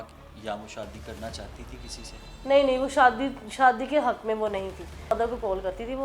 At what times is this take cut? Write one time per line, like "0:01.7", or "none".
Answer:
0:05.1